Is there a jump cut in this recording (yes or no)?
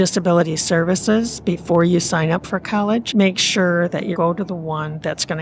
yes